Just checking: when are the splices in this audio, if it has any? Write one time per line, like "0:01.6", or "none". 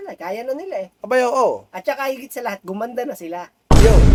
none

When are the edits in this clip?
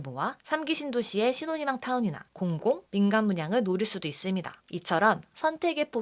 0:04.6

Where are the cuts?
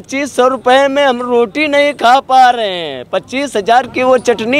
none

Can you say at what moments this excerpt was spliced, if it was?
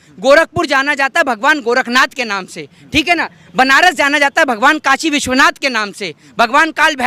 none

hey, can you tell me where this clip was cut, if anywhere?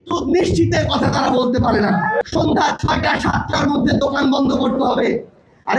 0:02.2

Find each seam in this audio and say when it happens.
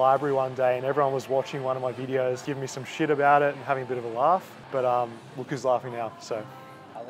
0:02.4
0:04.6

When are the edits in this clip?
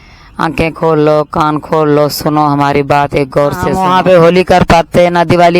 0:03.7

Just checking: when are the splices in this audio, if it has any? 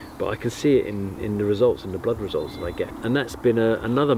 0:02.9

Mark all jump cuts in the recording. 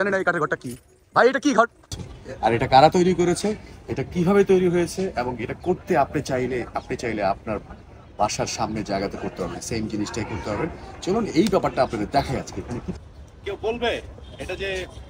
0:01.8
0:12.9

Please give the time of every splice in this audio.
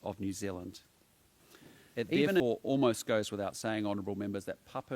0:01.1

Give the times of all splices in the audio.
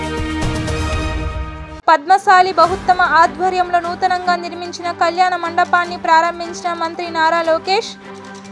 0:01.7

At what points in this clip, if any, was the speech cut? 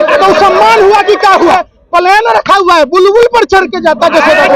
0:01.6

